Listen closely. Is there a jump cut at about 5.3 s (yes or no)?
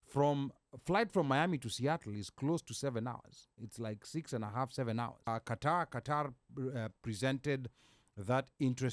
yes